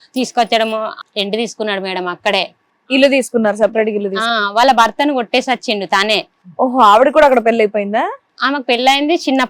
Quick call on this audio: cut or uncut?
cut